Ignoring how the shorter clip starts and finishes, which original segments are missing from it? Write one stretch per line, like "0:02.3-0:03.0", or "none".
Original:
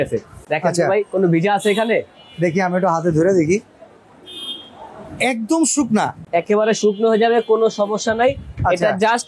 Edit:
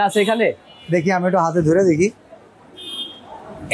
none

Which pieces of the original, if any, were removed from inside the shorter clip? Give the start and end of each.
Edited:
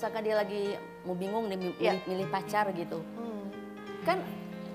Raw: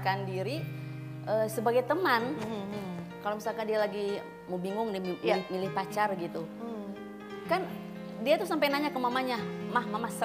none

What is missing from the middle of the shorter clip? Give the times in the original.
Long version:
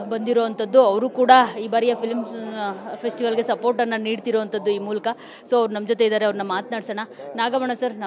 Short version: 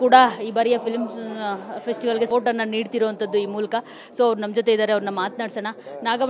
0:03.5-0:03.6

